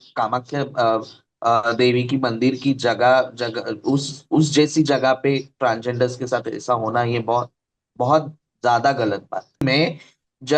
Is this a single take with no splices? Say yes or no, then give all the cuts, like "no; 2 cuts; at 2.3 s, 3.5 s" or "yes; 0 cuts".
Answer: no; 1 cut; at 9.6 s